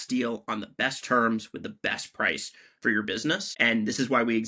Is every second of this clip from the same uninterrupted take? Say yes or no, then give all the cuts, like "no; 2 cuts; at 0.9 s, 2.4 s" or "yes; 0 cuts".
no; 1 cut; at 3.5 s